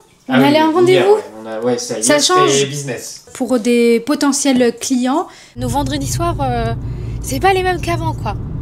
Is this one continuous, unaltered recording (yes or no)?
no